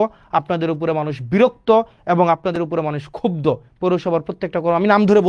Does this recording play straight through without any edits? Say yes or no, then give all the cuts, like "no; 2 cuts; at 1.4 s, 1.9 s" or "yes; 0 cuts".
yes; 0 cuts